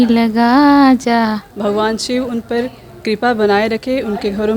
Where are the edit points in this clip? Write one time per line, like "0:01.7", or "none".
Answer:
0:01.4